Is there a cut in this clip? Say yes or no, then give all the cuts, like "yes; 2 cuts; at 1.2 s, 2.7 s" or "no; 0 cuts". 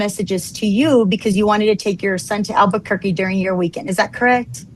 no; 0 cuts